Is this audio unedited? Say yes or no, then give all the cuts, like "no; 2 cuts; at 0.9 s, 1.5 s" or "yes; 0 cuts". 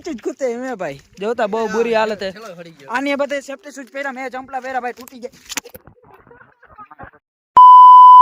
no; 1 cut; at 7.3 s